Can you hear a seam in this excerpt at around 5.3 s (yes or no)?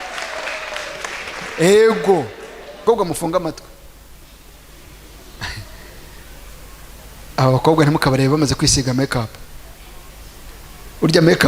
no